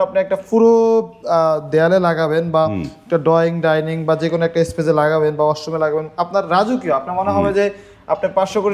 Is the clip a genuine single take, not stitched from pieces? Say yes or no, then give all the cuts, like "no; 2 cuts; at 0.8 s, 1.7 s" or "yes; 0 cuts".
yes; 0 cuts